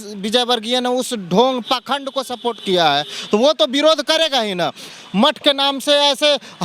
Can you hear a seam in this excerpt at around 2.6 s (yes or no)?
no